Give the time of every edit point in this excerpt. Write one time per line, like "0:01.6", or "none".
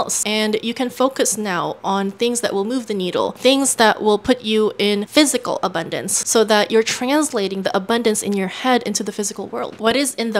none